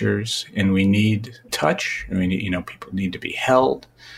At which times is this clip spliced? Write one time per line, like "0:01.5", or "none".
0:01.5